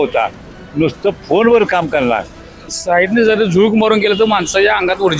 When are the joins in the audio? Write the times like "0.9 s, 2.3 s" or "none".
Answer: 2.7 s